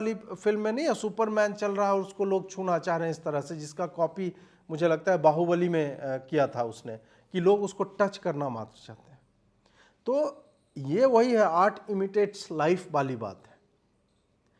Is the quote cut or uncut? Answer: uncut